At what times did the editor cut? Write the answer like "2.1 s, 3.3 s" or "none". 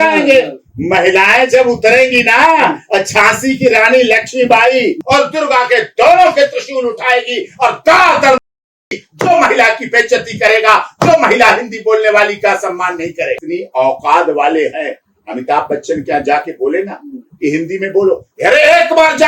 5.0 s, 13.4 s